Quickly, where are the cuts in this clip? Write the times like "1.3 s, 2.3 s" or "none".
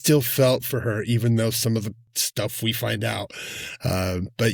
none